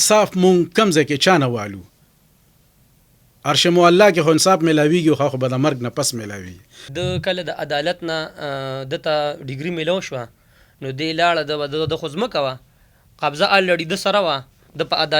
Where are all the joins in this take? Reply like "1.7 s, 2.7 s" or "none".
6.8 s